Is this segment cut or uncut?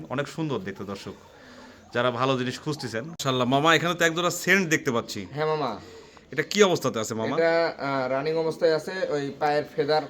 cut